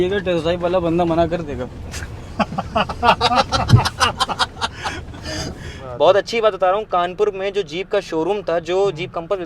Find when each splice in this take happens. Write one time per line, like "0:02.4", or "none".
0:05.8